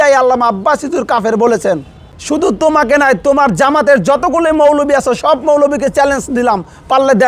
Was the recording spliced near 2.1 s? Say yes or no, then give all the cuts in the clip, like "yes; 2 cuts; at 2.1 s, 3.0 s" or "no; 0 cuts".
yes; 1 cut; at 2.1 s